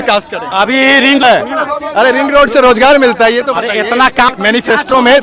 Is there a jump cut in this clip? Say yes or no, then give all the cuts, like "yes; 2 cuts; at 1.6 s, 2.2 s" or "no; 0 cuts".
yes; 2 cuts; at 1.2 s, 4.3 s